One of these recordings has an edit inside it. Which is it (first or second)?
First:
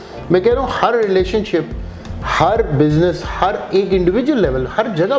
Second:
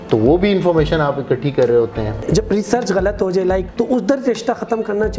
second